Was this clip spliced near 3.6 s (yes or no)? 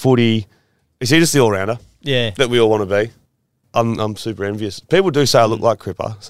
yes